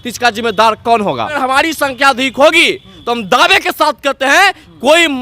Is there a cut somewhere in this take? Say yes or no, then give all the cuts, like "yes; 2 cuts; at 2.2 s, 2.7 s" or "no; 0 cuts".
yes; 1 cut; at 1.4 s